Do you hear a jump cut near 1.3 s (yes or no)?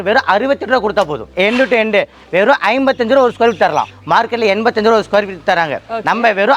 yes